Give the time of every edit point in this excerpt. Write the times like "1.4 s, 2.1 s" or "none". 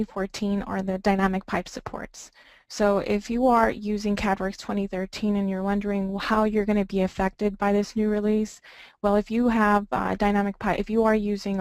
none